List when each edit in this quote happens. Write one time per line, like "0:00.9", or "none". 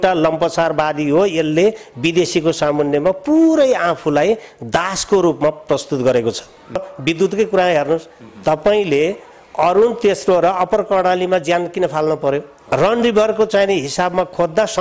0:06.9
0:12.6